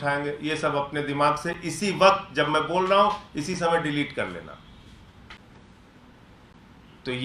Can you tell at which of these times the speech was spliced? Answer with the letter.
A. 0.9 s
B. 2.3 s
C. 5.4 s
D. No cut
C